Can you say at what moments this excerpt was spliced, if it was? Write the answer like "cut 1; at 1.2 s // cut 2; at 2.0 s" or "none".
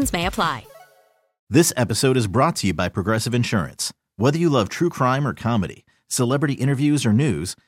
cut 1; at 1.4 s